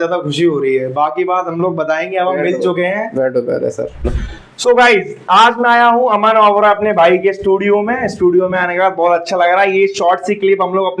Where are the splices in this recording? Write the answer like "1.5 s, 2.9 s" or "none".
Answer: 4.1 s